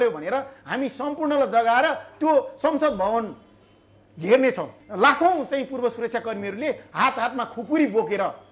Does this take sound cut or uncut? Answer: cut